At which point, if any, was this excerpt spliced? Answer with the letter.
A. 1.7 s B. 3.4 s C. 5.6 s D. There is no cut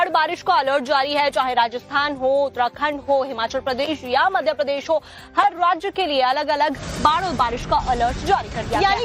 B